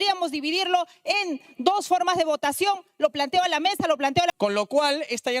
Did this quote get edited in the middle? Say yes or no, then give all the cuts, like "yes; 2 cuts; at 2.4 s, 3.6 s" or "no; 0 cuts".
yes; 1 cut; at 4.4 s